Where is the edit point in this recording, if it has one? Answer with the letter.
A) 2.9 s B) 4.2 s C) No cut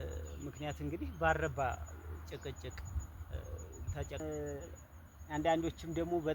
B